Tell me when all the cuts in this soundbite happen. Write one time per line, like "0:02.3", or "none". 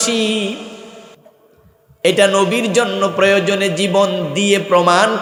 none